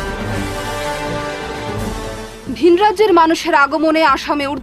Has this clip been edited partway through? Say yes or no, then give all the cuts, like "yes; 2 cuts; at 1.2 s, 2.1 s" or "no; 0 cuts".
no; 0 cuts